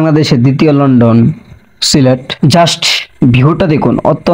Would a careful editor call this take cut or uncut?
uncut